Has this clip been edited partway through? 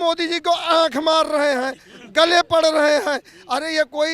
no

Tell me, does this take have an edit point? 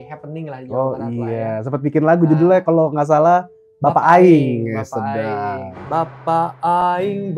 yes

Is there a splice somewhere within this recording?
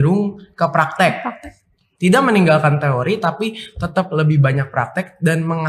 no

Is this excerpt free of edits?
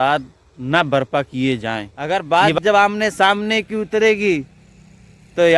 no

